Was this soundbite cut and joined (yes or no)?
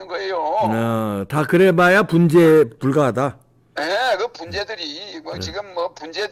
no